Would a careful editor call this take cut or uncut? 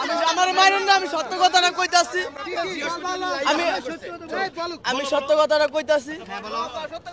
uncut